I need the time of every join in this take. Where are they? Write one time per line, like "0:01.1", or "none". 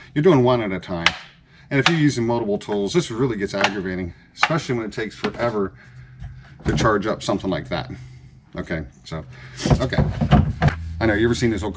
0:10.7